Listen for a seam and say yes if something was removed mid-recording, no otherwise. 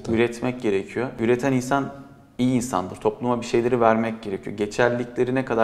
no